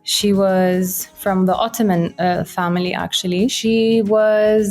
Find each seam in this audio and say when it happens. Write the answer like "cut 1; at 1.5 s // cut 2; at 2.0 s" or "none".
cut 1; at 3.6 s

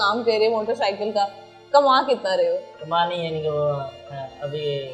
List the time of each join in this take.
none

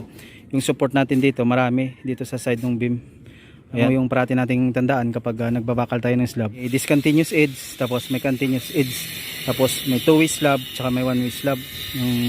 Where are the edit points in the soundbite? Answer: cut 1; at 3.8 s // cut 2; at 6.6 s

